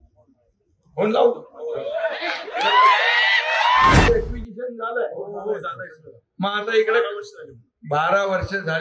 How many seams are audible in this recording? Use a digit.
1